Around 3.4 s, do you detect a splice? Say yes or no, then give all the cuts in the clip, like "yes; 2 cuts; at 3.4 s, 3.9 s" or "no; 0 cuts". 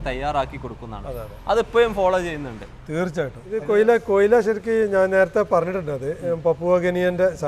yes; 1 cut; at 3.4 s